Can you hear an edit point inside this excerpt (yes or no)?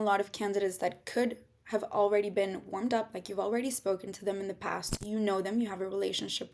no